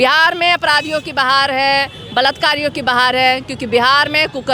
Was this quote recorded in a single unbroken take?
yes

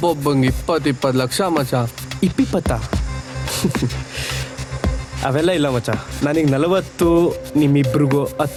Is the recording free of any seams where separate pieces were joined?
yes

